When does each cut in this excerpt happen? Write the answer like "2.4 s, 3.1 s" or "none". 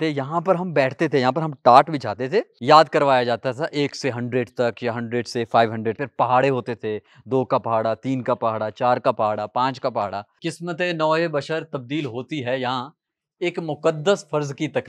2.5 s, 6.0 s, 10.3 s